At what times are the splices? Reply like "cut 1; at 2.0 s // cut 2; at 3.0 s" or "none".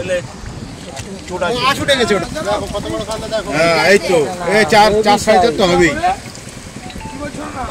cut 1; at 2.2 s